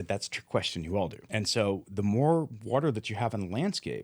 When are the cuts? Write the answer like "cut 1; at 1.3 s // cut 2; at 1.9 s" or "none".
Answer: cut 1; at 1.2 s